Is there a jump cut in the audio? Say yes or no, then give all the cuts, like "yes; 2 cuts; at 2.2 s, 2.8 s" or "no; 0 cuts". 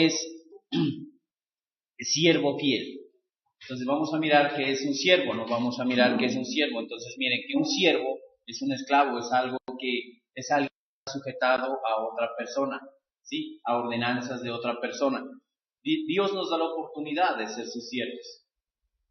yes; 1 cut; at 7.1 s